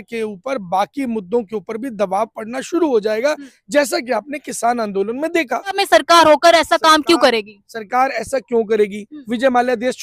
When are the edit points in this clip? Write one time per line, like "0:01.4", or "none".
0:05.8